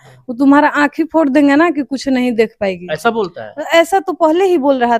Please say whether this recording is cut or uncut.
uncut